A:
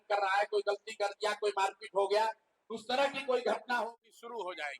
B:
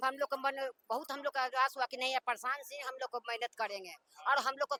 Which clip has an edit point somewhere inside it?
A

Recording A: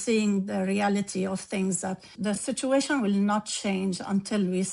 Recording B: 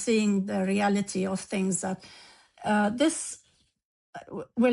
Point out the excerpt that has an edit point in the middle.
A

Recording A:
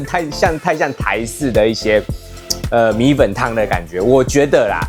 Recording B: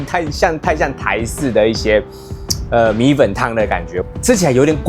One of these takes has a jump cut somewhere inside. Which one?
B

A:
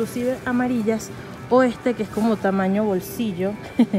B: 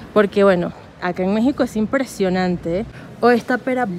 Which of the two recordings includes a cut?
B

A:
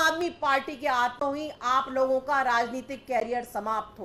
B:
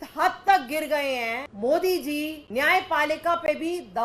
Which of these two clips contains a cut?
B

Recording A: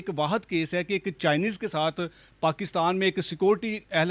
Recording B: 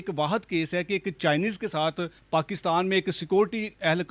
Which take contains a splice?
B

